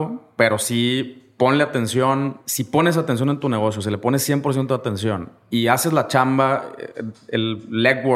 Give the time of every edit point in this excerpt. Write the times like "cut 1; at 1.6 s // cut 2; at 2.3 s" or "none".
cut 1; at 2.4 s // cut 2; at 5.3 s